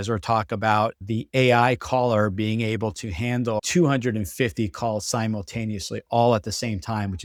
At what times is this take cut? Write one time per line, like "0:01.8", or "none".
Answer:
none